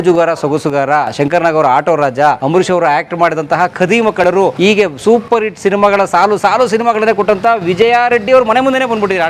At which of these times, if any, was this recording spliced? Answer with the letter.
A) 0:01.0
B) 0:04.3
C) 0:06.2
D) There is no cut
B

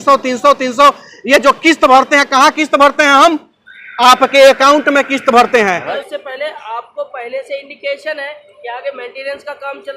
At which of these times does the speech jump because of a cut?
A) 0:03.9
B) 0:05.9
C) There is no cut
B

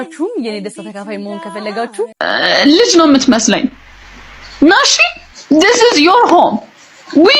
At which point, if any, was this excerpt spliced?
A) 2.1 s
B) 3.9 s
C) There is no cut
A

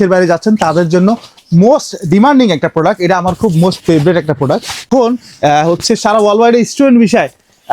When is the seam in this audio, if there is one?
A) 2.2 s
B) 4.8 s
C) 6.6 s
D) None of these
B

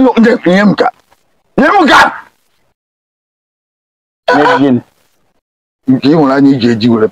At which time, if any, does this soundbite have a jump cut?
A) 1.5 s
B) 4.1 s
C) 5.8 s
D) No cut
D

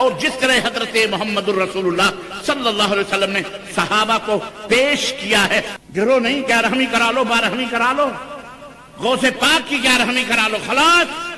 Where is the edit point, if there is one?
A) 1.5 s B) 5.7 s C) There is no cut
B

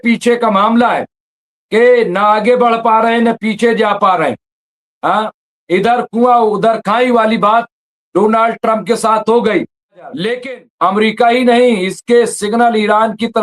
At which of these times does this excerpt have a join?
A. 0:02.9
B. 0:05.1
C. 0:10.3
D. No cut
C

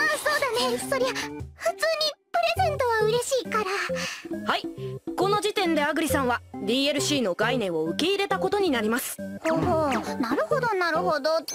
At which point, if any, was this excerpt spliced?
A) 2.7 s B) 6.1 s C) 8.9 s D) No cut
B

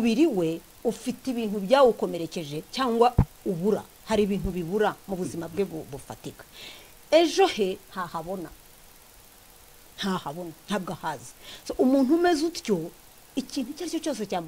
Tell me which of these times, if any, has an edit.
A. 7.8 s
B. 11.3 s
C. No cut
C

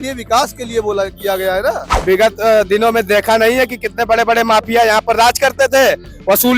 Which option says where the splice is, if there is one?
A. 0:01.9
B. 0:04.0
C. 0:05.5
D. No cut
A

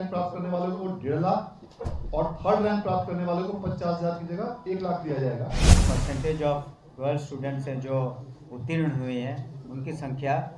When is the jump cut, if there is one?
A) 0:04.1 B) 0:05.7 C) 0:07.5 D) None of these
B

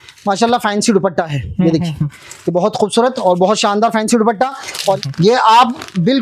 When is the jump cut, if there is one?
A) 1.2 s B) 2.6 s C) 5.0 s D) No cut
C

